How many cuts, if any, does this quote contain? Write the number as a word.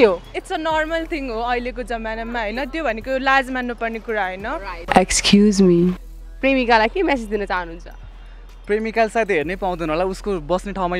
two